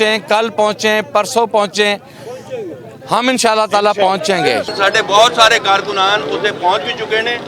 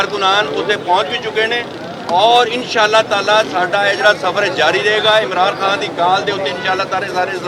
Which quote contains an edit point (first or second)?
first